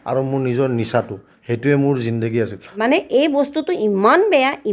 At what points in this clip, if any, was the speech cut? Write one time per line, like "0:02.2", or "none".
0:02.8

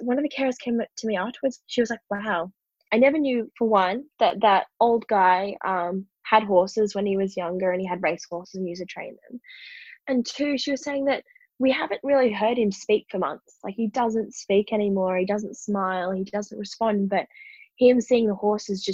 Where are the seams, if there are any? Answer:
0:01.6
0:02.7

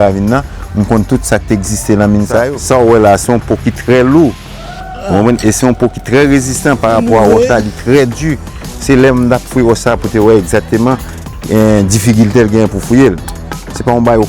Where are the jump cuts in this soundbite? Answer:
0:02.5

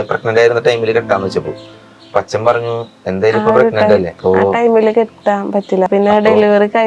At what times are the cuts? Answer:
0:04.1
0:05.9

